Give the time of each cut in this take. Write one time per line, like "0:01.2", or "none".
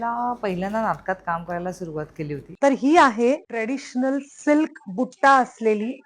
0:02.5
0:03.5